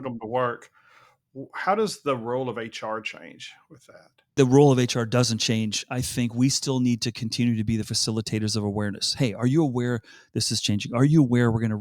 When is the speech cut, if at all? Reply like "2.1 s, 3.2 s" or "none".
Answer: 4.3 s